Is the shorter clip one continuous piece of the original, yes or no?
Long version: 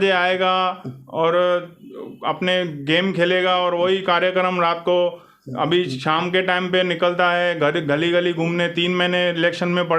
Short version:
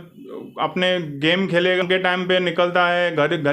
no